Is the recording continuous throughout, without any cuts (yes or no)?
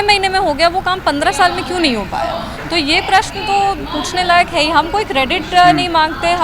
yes